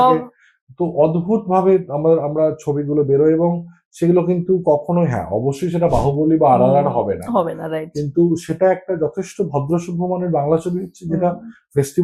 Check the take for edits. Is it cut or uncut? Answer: uncut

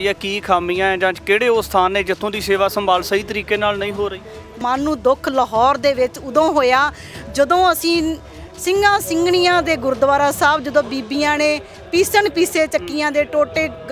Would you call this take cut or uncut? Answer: cut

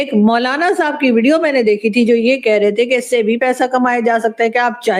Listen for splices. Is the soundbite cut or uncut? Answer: uncut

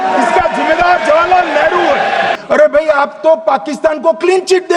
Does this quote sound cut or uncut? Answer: cut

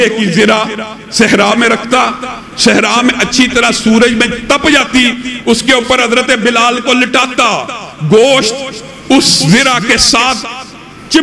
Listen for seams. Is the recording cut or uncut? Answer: uncut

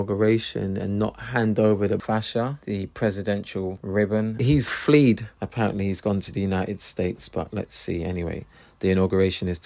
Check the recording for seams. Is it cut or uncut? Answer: uncut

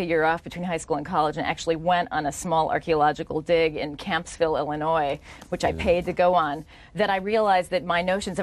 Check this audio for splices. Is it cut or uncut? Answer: uncut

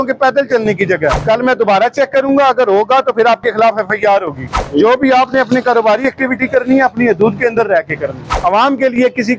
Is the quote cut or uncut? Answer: cut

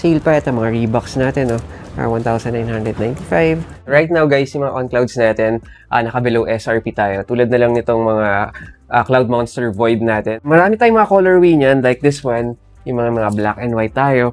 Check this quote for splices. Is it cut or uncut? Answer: cut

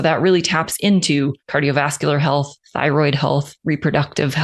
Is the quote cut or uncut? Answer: cut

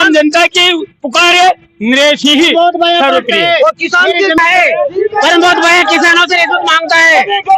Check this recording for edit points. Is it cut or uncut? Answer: cut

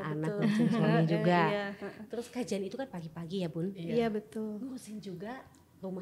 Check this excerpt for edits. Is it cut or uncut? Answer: uncut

